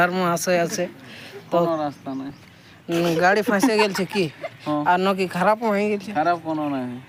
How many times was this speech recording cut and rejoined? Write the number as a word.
zero